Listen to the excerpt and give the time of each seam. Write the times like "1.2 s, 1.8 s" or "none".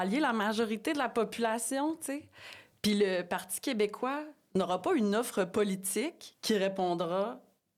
none